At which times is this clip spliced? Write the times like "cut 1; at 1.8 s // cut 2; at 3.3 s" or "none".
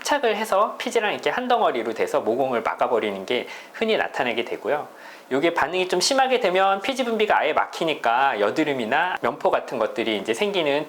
cut 1; at 9.1 s